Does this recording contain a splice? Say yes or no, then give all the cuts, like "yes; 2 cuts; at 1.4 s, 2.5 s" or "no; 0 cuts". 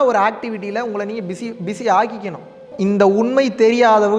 yes; 1 cut; at 2.7 s